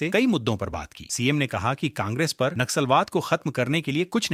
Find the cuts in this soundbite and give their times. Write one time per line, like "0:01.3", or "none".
none